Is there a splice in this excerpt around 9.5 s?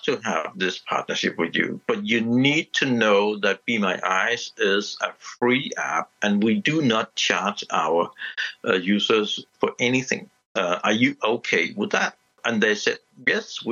yes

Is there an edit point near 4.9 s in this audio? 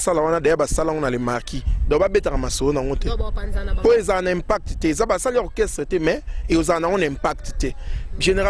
no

